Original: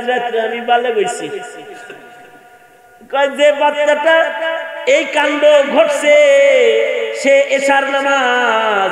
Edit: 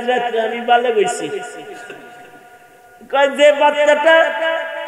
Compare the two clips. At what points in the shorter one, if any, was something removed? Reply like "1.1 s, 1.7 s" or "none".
none